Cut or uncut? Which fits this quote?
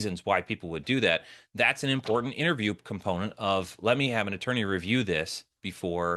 uncut